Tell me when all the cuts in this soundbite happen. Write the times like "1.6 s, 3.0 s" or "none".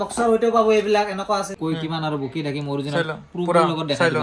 1.5 s